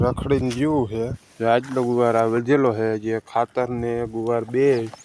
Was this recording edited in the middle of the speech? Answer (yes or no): yes